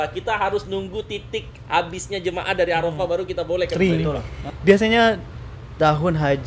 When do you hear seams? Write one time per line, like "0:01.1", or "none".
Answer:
0:03.7